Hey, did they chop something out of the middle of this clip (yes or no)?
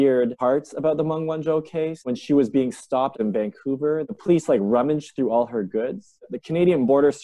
yes